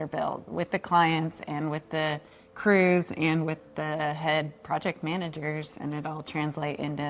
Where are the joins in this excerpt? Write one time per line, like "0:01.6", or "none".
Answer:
none